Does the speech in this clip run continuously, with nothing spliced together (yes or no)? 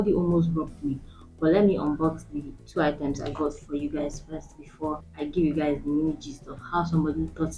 yes